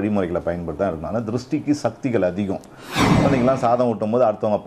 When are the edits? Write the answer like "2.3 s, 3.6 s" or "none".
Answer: 3.2 s